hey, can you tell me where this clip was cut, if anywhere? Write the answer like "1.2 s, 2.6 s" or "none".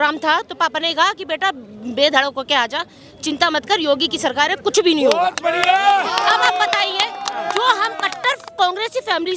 none